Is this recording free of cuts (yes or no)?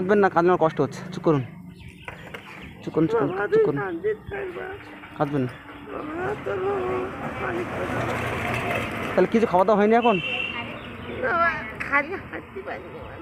yes